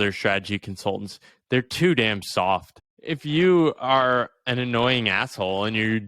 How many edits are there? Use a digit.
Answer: 1